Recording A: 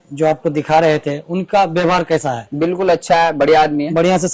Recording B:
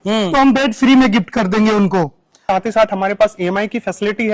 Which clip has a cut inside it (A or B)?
B